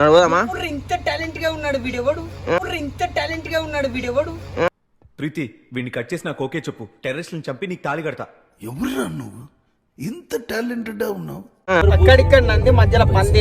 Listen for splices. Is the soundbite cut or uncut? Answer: cut